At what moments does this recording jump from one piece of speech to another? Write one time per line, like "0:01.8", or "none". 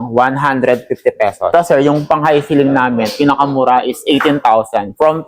0:01.5